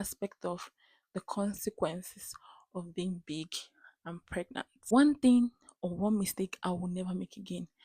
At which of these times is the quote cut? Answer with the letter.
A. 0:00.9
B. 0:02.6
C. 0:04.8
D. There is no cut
C